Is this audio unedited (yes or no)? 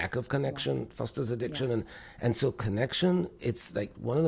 yes